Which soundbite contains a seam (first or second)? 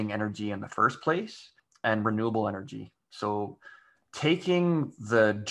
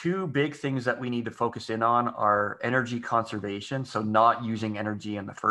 first